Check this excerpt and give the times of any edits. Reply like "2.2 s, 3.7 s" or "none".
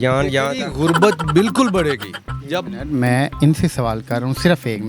none